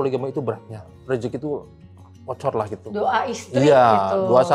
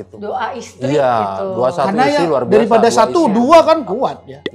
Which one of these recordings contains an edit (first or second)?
first